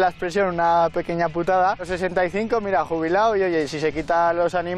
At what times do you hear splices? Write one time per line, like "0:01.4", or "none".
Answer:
0:01.9

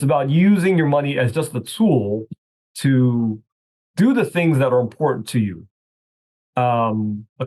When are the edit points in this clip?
none

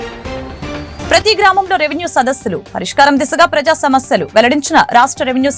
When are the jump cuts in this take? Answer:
0:00.9

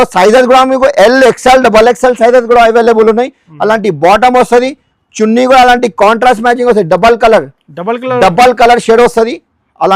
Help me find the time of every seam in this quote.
none

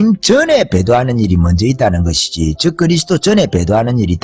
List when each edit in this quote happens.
none

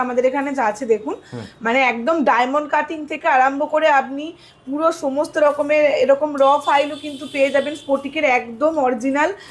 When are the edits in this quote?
none

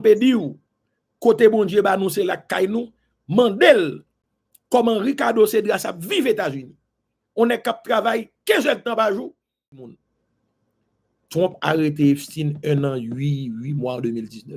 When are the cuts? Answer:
0:09.9

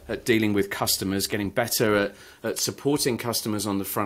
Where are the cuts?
none

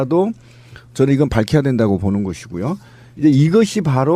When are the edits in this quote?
none

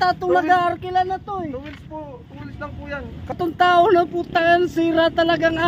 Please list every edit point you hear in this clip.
0:03.4

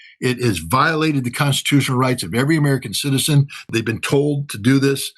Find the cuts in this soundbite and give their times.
0:03.7

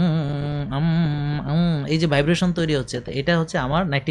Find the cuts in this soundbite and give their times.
none

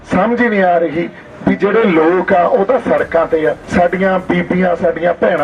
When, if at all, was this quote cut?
0:03.6

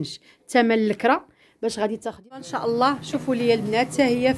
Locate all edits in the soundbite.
0:02.5

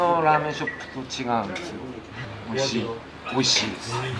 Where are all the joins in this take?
0:02.2

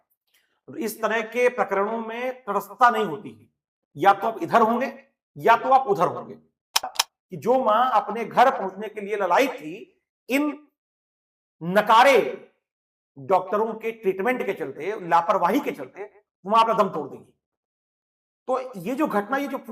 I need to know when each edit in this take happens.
0:06.9

